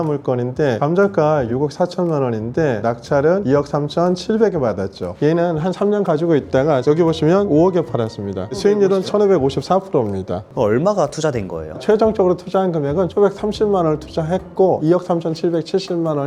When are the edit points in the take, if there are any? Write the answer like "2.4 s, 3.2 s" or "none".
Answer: none